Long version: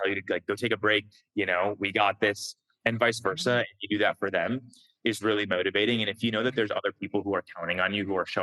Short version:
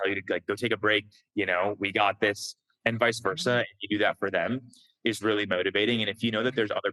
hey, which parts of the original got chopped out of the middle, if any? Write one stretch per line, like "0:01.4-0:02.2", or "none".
none